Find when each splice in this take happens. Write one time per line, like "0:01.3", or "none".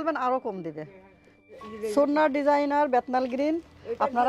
0:01.5